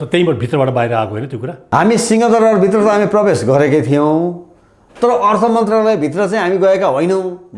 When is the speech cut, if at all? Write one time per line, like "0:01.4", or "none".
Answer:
0:01.6